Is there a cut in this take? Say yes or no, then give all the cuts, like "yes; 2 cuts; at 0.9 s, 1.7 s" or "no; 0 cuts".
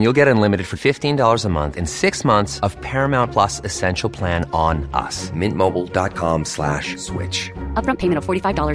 no; 0 cuts